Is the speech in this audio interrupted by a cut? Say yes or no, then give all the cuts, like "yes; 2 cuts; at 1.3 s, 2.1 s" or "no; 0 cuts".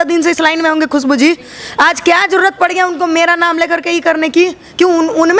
no; 0 cuts